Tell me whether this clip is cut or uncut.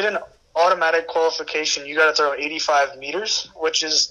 uncut